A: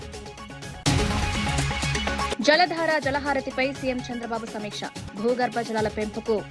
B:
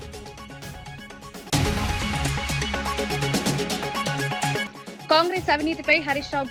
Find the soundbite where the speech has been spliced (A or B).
A